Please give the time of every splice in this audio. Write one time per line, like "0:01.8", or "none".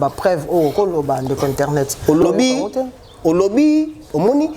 0:02.2